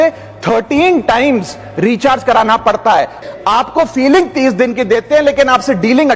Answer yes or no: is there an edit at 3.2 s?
yes